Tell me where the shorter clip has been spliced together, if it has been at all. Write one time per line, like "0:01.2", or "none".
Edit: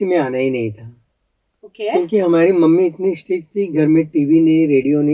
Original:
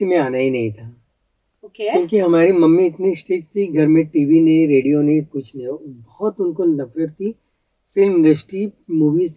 none